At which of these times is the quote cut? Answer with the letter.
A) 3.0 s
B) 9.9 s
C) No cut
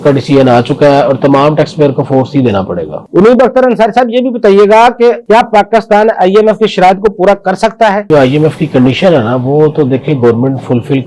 C